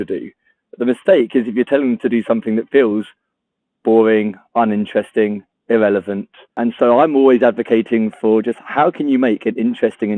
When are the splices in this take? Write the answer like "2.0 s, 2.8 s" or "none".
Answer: 6.5 s